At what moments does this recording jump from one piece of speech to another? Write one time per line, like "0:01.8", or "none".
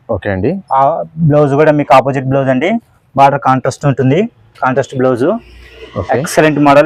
none